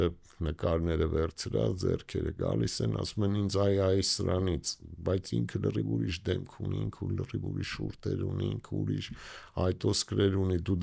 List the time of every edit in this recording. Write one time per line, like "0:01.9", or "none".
none

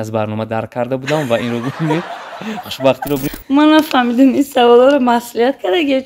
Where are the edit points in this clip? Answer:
0:03.3

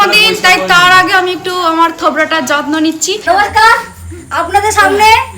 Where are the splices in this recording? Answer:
0:03.2

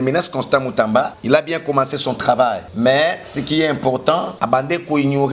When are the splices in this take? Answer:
0:01.2
0:02.7
0:04.3

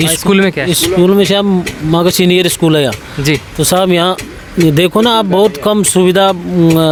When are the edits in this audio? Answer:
none

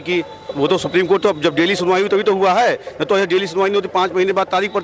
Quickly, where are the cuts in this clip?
none

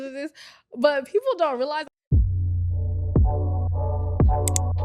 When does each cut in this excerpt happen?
0:01.9

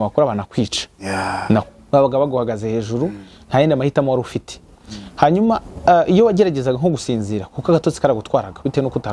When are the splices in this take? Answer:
0:01.7

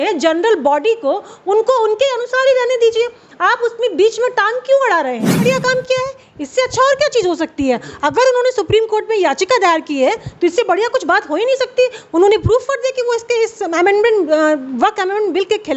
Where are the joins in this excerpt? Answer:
0:05.4

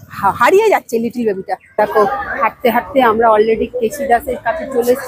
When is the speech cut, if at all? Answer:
0:01.8

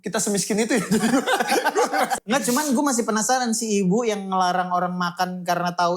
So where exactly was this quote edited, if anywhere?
0:02.1

